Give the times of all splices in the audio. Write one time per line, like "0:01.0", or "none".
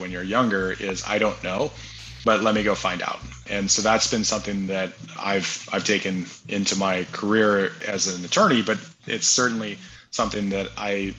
0:03.4
0:05.1
0:07.8